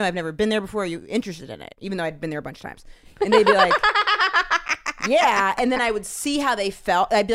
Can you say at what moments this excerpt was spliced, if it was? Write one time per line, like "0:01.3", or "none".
none